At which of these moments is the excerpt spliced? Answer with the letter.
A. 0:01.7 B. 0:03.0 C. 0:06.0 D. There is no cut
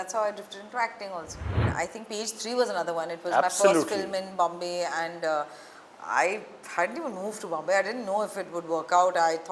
A